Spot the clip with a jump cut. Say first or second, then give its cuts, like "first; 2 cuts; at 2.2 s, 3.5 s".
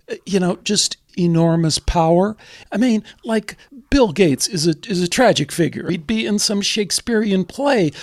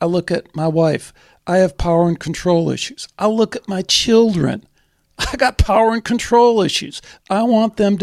first; 4 cuts; at 1.0 s, 2.6 s, 3.7 s, 5.9 s